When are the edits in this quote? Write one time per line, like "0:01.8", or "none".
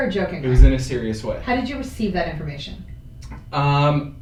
none